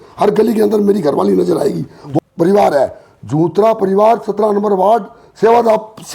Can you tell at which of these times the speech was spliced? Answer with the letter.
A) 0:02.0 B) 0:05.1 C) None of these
A